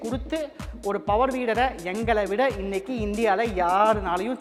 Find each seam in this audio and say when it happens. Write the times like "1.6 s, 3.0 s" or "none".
none